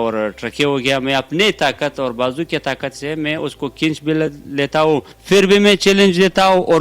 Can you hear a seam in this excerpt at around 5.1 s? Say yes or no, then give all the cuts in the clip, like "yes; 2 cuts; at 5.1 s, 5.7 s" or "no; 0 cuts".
yes; 1 cut; at 5.1 s